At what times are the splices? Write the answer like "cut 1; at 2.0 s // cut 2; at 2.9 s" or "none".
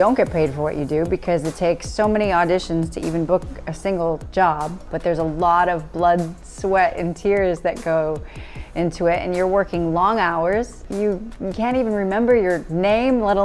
cut 1; at 4.9 s // cut 2; at 10.8 s